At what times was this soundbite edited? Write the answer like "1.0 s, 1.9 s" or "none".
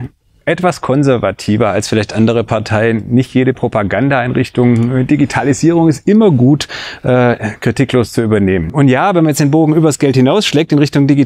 8.7 s